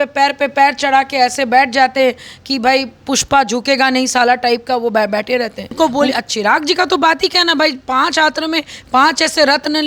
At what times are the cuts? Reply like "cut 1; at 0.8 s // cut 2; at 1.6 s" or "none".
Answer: cut 1; at 5.7 s